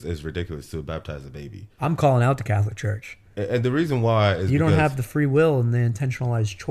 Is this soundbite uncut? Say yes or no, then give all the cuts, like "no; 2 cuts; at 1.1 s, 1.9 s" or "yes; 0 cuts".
no; 1 cut; at 1.6 s